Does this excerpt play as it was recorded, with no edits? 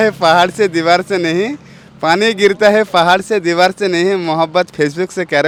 yes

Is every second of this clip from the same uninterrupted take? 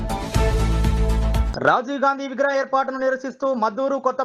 yes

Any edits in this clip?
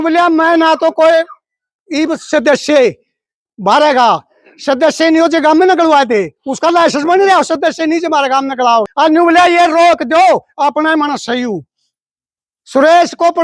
yes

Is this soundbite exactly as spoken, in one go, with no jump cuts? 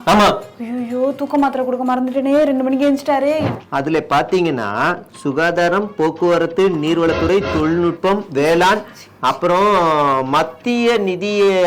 no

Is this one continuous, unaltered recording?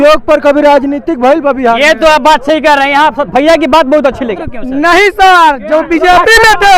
no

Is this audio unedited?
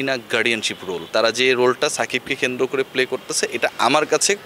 no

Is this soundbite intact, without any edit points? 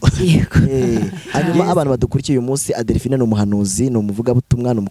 no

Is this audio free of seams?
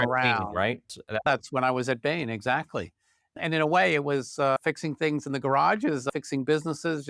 no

